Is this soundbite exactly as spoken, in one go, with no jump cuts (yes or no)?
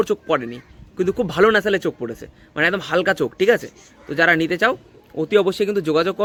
yes